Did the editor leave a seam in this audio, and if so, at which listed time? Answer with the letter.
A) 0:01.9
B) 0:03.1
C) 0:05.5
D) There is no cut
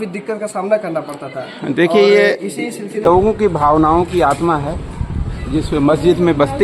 B